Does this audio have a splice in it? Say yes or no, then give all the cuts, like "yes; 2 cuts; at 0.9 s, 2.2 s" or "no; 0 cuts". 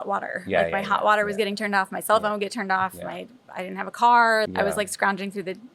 yes; 1 cut; at 4.5 s